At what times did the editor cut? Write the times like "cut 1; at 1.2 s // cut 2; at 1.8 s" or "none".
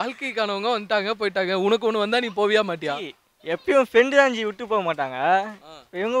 none